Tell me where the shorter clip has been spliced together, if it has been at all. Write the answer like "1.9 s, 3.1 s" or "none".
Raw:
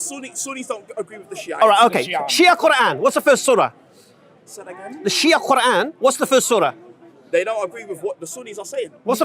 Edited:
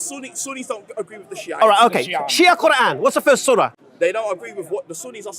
3.8 s

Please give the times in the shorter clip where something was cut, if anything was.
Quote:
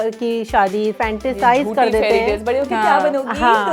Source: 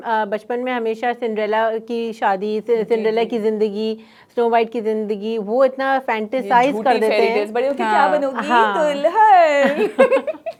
0.9 s

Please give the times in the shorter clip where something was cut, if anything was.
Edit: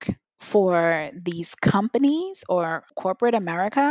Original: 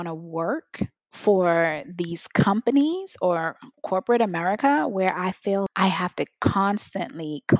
2.8 s

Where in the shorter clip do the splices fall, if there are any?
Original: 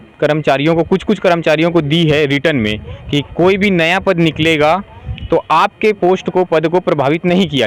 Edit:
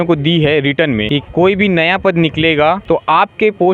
1.1 s, 2.8 s

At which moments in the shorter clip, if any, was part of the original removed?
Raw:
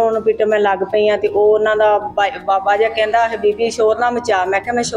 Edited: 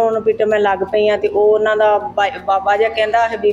none

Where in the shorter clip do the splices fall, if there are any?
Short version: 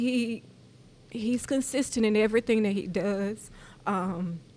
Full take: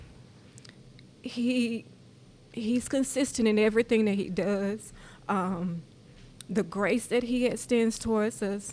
none

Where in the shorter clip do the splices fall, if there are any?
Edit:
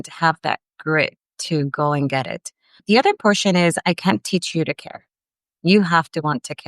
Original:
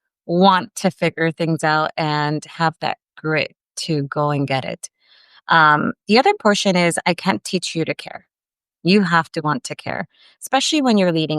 2.8 s

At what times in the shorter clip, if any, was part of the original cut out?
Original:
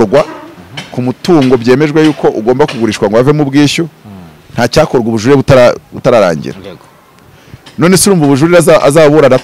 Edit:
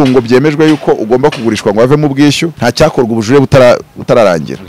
2.5 s

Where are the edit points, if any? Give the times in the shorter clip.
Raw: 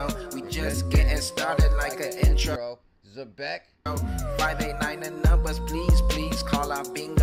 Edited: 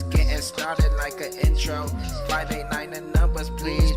1.8 s

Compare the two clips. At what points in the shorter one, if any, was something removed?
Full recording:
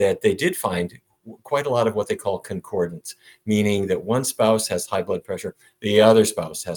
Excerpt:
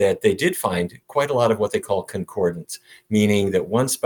1.0 s

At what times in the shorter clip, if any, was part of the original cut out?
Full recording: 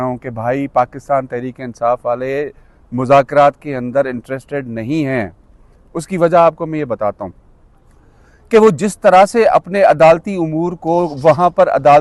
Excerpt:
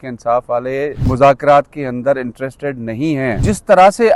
1.0 s, 3.4 s

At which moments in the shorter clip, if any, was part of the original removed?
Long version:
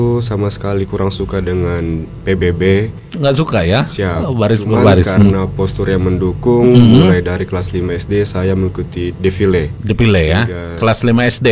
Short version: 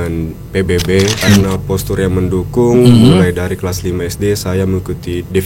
1.2 s

